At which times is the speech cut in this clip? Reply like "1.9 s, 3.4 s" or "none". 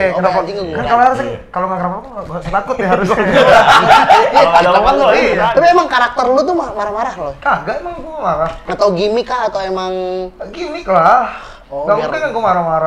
5.4 s